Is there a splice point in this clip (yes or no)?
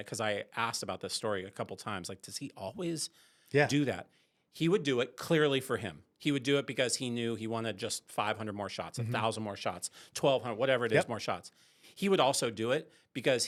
no